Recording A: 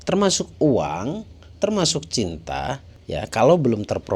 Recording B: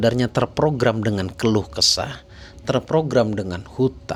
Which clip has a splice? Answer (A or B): A